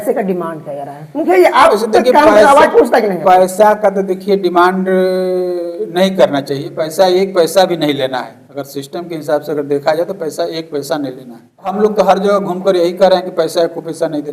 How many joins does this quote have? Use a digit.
1